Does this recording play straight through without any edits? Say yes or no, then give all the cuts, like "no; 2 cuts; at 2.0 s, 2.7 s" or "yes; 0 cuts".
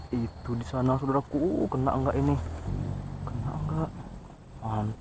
no; 1 cut; at 2.7 s